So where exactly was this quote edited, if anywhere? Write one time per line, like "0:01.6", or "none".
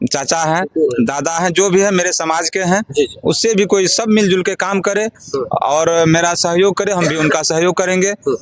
none

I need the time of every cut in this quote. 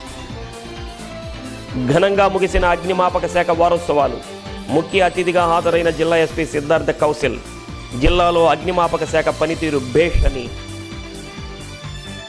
0:01.3

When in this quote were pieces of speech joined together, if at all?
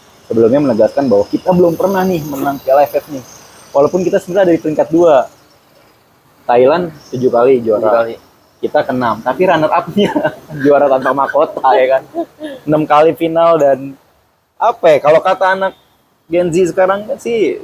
none

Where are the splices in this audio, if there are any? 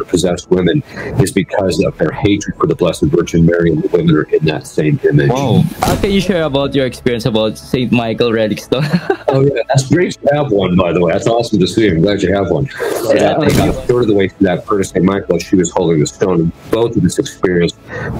0:05.7
0:13.5

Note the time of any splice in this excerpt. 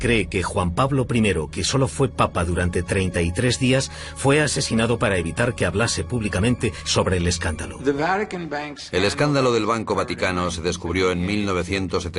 0:05.2

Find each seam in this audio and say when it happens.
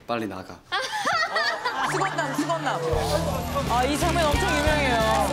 0:03.0

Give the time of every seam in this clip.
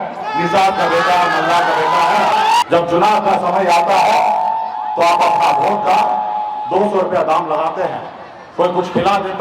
0:02.6

